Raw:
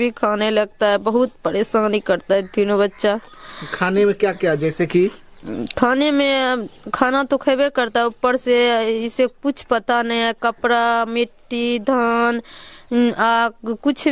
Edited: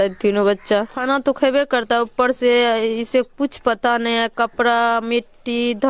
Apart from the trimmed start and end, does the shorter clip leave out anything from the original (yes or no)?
yes